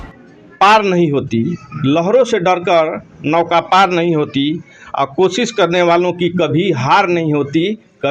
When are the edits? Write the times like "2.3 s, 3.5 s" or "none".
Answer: none